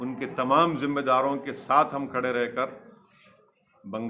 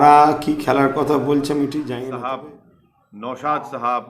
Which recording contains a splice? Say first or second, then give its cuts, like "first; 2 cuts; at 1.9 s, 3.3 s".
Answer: second; 1 cut; at 1.9 s